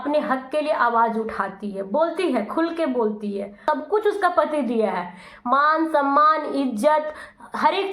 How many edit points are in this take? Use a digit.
1